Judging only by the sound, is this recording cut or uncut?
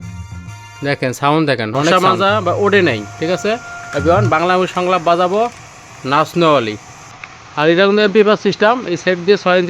cut